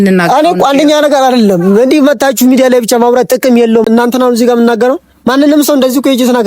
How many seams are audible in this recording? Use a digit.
1